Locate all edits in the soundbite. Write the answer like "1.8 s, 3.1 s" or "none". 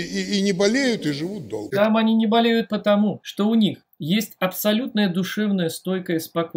1.6 s, 3.2 s, 3.9 s